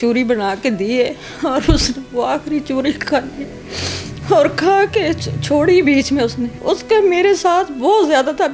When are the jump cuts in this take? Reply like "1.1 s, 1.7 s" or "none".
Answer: 6.5 s